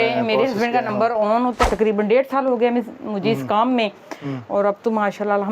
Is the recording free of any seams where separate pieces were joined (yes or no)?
no